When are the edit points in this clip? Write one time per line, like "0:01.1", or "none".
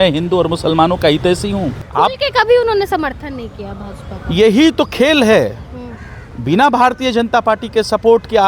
0:01.8